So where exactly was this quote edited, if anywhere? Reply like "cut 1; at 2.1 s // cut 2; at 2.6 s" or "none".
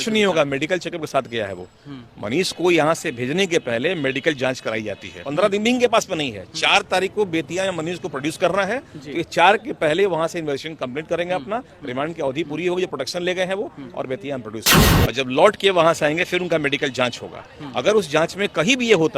cut 1; at 5.2 s // cut 2; at 14.9 s